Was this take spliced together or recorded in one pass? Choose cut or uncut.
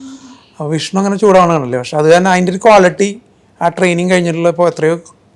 uncut